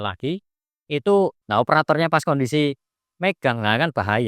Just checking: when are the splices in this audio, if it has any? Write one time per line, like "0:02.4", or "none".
0:01.4